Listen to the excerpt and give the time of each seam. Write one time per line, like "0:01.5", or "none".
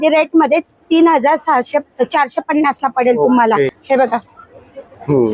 0:03.8